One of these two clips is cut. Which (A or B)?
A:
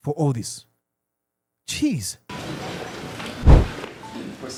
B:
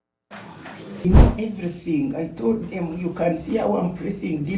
B